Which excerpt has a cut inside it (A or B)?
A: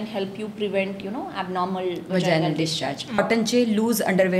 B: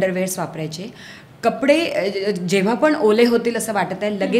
A